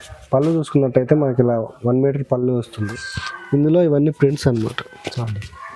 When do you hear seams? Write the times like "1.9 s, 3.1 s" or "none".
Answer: 2.8 s